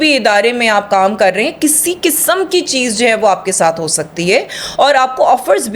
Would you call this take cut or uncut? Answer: uncut